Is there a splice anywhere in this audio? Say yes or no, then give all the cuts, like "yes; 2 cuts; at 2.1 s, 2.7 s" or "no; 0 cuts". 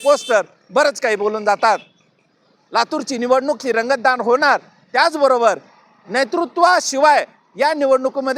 no; 0 cuts